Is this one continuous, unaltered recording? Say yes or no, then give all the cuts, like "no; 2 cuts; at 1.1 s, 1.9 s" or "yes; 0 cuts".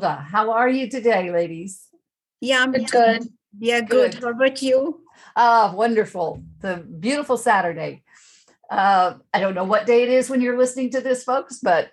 yes; 0 cuts